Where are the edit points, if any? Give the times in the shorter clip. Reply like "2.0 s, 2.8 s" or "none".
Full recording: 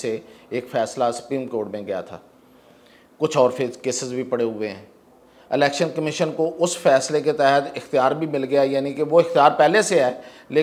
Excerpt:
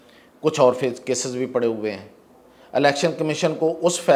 none